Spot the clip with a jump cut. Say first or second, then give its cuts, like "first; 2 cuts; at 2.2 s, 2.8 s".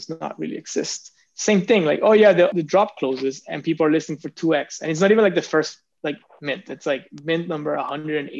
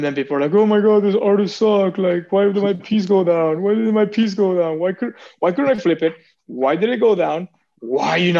first; 1 cut; at 2.5 s